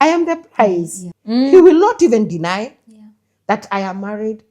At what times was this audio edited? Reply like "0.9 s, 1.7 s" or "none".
1.0 s